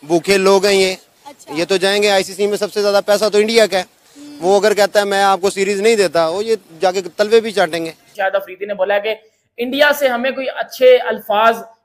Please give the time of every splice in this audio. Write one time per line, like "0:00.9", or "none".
0:08.1